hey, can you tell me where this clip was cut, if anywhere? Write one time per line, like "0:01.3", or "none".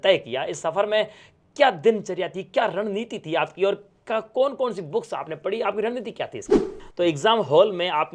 0:06.7